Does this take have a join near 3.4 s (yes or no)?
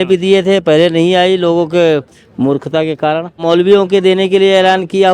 yes